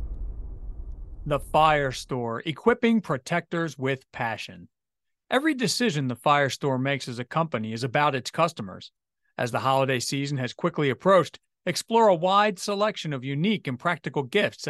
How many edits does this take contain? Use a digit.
1